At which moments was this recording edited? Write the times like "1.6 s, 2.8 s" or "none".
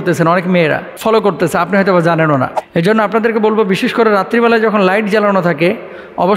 0.9 s, 2.6 s